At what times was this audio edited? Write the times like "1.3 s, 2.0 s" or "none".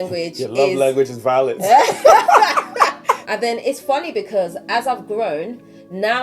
3.3 s